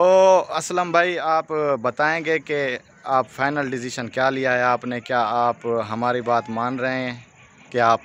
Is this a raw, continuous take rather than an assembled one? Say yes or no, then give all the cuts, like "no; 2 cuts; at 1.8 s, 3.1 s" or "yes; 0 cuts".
yes; 0 cuts